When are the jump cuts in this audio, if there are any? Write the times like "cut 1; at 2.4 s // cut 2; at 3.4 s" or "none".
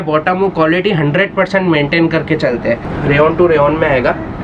cut 1; at 2.9 s